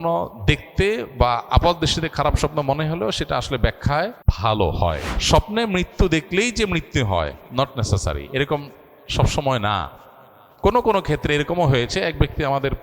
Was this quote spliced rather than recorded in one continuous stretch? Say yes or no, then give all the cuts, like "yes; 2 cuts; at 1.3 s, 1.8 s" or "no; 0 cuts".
yes; 2 cuts; at 4.2 s, 5.1 s